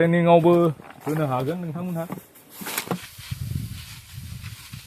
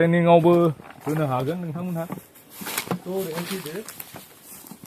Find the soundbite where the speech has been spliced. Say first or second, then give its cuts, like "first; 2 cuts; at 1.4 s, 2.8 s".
first; 1 cut; at 3.0 s